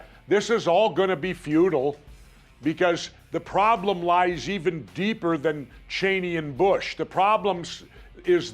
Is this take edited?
yes; 1 cut; at 7.0 s

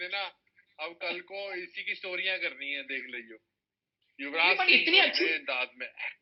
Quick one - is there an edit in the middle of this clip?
no; 0 cuts

